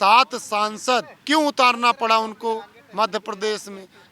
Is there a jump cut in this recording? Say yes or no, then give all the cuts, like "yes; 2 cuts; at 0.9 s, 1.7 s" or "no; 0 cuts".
yes; 1 cut; at 1.1 s